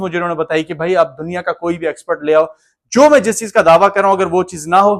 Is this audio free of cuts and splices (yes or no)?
yes